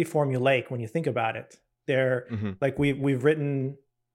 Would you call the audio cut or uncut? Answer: uncut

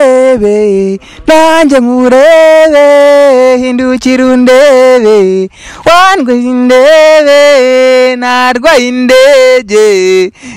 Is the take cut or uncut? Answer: uncut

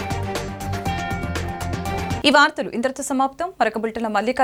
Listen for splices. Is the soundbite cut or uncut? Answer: uncut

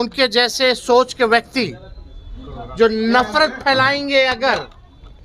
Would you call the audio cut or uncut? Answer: uncut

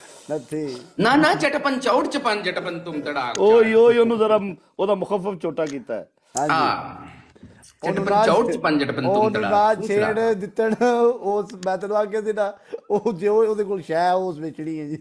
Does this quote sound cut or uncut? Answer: uncut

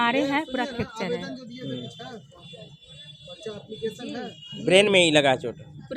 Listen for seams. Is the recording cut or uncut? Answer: uncut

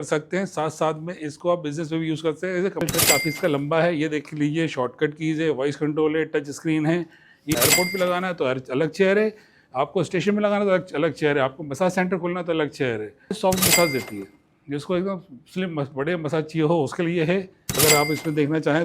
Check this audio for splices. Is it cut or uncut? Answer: cut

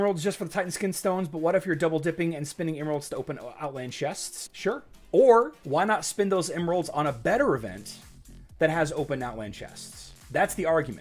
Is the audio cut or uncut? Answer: cut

